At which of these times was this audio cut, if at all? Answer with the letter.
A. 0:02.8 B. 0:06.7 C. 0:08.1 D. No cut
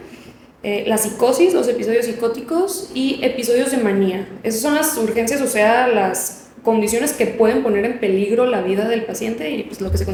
D